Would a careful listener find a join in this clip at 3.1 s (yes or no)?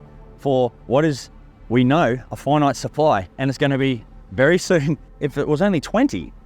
no